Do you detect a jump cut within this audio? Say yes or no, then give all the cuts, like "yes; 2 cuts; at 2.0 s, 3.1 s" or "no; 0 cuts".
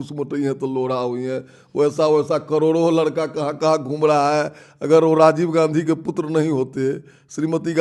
no; 0 cuts